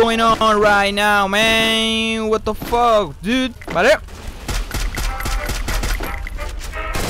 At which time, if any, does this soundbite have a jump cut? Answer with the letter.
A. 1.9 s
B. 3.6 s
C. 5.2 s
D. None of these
B